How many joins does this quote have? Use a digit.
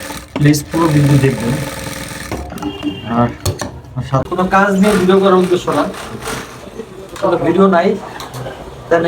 1